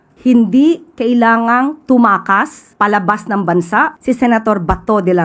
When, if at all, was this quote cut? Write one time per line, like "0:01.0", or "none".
0:02.6
0:04.0

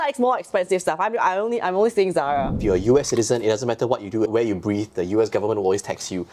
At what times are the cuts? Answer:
0:02.5
0:04.3

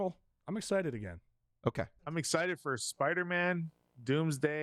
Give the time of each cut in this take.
0:02.0

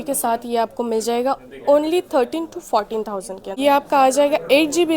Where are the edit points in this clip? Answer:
0:03.6

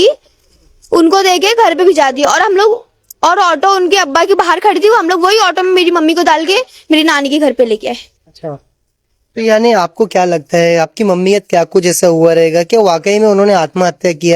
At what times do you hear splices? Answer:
none

